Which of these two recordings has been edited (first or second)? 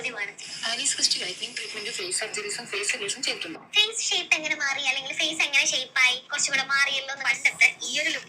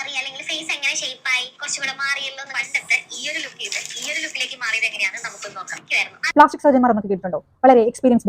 second